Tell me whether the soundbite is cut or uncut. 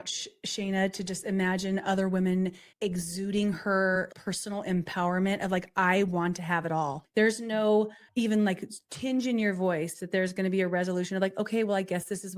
cut